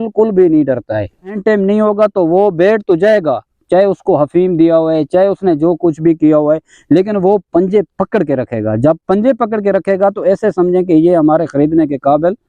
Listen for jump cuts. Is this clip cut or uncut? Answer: cut